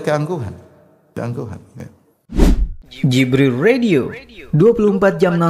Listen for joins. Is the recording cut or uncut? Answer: cut